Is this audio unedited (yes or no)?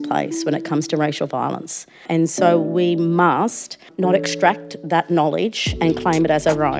no